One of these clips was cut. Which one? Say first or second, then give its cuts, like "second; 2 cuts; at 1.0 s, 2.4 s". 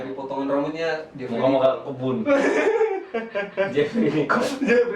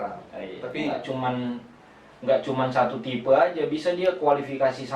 second; 1 cut; at 1.0 s